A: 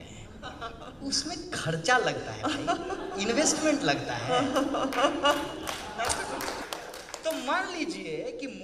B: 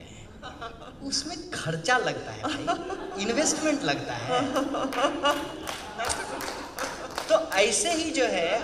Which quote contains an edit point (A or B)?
A